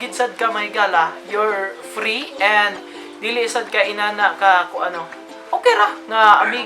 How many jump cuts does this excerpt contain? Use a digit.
0